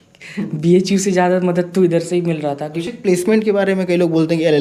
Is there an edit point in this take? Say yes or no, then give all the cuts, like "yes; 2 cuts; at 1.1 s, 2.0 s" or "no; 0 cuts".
yes; 1 cut; at 2.8 s